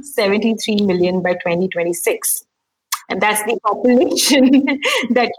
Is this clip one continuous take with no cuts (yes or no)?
yes